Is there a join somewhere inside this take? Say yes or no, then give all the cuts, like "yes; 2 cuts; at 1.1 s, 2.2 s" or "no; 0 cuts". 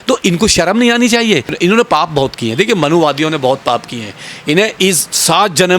yes; 1 cut; at 1.6 s